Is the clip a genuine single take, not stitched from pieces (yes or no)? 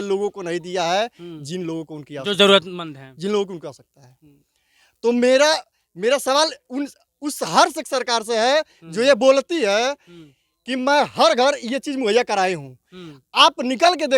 yes